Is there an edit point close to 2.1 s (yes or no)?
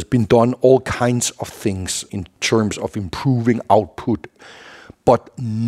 yes